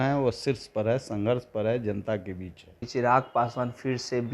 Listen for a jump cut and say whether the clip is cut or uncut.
cut